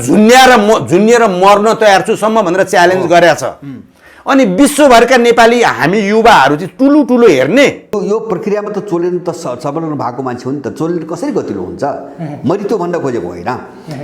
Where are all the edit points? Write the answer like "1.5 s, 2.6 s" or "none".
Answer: 7.9 s

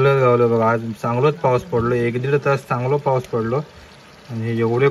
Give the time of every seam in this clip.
none

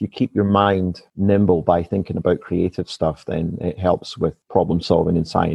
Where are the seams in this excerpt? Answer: 1.0 s, 4.4 s

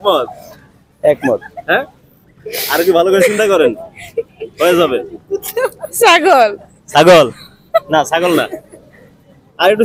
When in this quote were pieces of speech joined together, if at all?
none

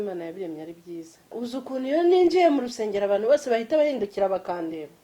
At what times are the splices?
1.3 s

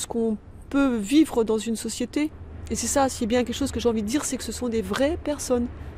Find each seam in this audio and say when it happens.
2.5 s

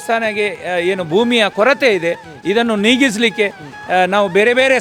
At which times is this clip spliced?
none

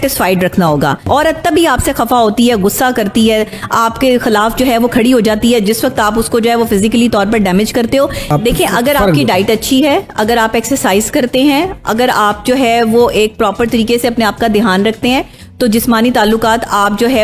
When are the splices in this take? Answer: 1.1 s, 8.3 s

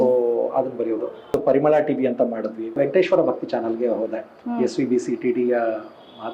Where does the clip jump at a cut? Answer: 1.3 s, 2.8 s

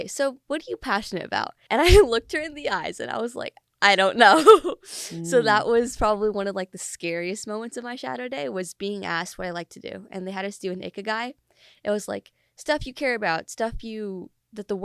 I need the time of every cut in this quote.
1.6 s

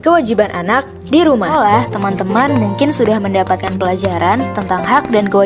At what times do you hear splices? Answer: 1.5 s

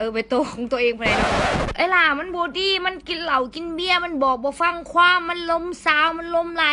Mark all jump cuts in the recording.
none

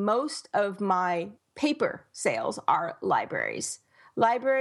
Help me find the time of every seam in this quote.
1.4 s

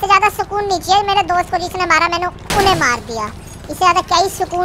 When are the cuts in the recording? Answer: none

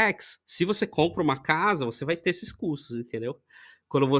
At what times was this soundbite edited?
none

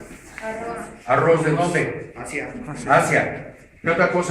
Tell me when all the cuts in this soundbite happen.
1.5 s

